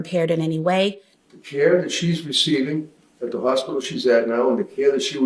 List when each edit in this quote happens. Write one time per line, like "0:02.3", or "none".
0:01.1